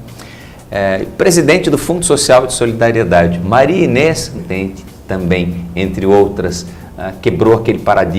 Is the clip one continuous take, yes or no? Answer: yes